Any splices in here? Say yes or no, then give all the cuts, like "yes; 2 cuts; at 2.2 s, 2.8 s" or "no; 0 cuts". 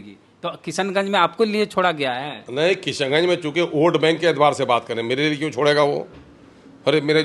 no; 0 cuts